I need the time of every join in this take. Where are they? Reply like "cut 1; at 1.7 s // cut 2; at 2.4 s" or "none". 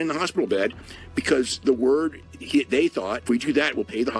cut 1; at 3.2 s